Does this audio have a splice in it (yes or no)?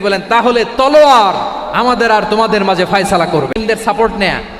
yes